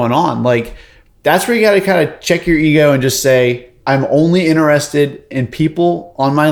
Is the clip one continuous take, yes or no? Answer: yes